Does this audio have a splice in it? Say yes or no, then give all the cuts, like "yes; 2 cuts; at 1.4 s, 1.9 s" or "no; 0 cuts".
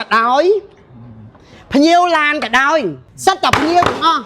yes; 1 cut; at 3.1 s